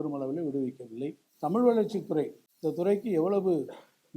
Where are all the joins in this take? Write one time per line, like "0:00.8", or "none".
0:01.2
0:02.4